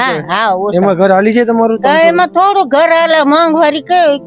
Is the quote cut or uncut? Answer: uncut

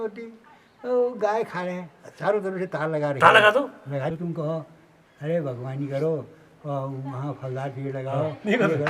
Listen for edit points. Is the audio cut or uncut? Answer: cut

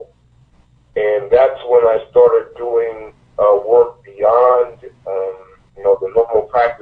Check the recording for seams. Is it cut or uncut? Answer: uncut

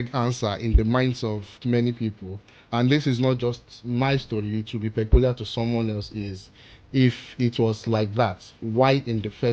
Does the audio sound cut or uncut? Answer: uncut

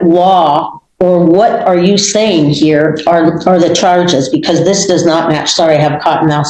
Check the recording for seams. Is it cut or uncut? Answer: uncut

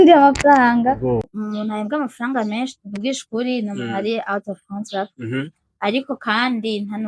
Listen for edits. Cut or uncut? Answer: cut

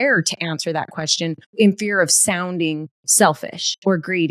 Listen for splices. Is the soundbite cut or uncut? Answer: cut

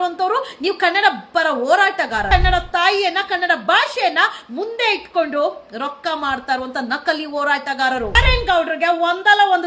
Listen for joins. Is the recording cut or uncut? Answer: cut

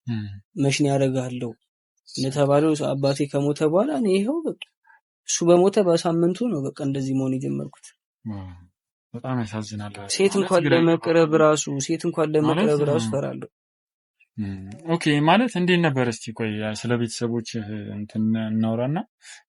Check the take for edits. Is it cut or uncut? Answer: uncut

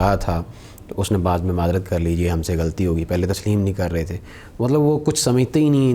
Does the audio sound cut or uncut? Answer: uncut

